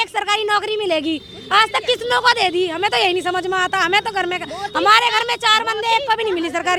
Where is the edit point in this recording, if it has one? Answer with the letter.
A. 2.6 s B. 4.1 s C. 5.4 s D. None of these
D